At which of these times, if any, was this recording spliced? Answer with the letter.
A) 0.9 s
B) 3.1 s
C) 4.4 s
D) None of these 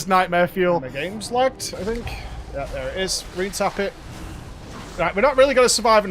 A